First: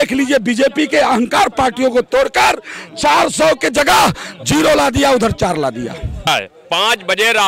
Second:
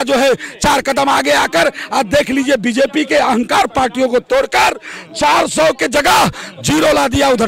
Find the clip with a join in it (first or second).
first